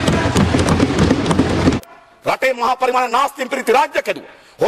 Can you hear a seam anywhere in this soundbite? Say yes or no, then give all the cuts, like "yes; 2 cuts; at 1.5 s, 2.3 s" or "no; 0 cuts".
yes; 1 cut; at 1.8 s